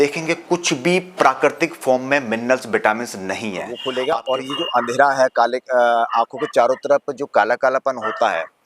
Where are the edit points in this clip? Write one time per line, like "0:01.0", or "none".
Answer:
0:03.7